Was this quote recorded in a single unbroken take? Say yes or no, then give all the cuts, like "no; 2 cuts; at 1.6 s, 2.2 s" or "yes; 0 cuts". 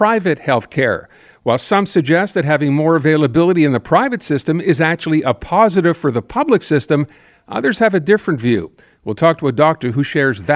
yes; 0 cuts